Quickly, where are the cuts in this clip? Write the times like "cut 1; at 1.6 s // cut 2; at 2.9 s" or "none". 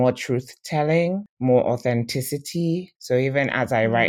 cut 1; at 1.3 s // cut 2; at 2.9 s